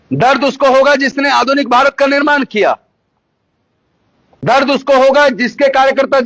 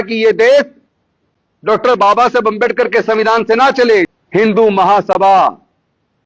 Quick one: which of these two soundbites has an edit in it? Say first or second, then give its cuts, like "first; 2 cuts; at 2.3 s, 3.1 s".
second; 1 cut; at 4.2 s